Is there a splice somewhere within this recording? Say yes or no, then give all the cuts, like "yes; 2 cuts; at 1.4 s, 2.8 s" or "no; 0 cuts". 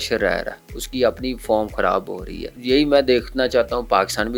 no; 0 cuts